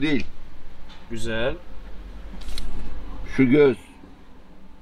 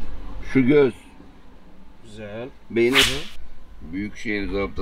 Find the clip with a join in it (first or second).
second